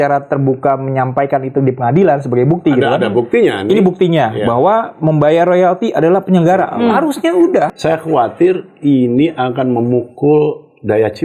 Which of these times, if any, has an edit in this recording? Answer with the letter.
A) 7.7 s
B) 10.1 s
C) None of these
A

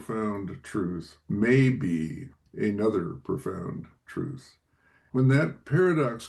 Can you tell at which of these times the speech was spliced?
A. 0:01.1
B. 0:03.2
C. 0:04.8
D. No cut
C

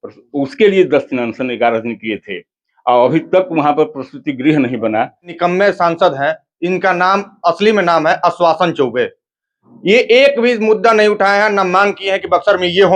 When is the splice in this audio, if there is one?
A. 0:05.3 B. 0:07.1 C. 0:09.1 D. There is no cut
A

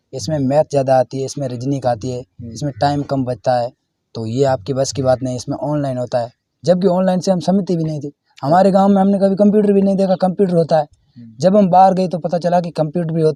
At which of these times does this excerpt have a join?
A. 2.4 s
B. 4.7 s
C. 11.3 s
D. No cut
D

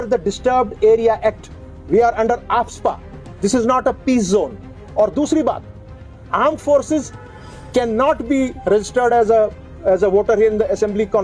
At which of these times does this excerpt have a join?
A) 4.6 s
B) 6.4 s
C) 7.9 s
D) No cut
D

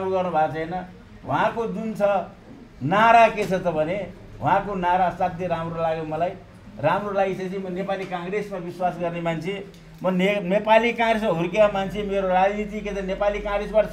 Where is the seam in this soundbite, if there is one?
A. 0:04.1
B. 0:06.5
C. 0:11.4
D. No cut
D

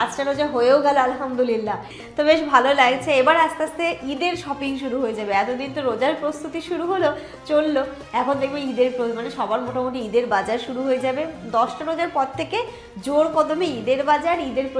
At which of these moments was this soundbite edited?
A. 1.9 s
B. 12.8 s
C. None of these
A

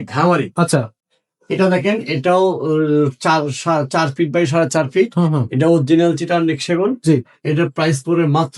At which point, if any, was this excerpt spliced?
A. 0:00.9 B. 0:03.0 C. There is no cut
A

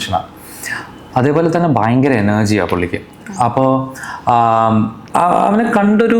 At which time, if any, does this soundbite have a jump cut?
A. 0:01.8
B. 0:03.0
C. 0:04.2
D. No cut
D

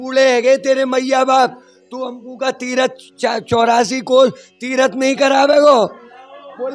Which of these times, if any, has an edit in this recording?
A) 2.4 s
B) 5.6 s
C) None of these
C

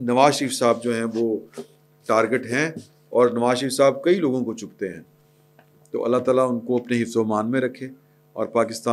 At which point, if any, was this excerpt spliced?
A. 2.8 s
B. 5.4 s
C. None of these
C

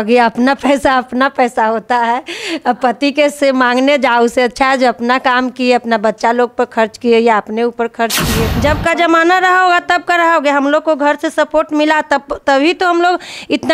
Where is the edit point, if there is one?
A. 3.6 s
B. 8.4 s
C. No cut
B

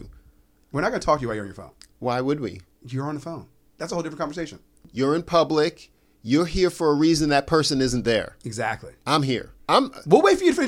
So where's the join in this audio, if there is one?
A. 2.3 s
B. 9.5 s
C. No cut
B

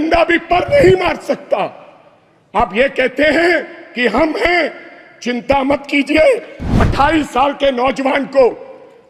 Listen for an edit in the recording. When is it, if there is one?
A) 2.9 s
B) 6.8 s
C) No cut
B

